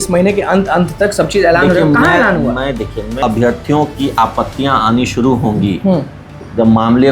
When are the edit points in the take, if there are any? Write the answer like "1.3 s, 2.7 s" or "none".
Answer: 3.2 s